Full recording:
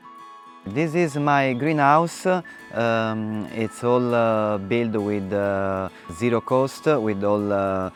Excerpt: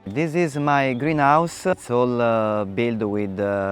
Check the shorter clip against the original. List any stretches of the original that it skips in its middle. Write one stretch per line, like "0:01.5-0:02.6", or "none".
0:02.4-0:03.7